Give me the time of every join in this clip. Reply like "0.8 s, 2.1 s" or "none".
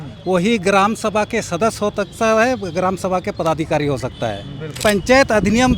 4.8 s